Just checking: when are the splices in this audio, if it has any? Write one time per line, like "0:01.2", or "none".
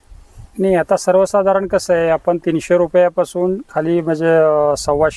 none